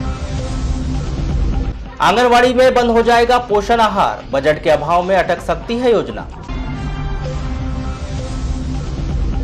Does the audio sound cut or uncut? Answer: cut